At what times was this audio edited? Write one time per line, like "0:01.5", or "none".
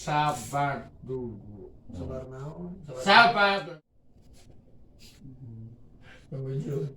0:03.6